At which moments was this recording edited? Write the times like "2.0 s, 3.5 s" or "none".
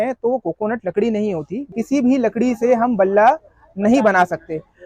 1.7 s